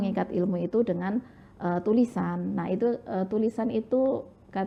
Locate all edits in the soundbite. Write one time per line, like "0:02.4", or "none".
none

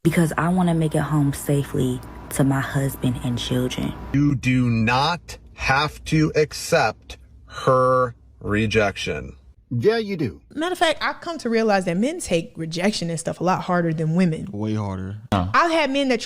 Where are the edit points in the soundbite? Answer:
0:04.0
0:10.4

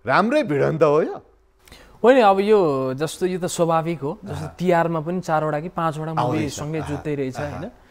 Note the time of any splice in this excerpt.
none

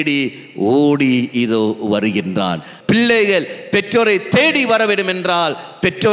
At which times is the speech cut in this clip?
0:02.7

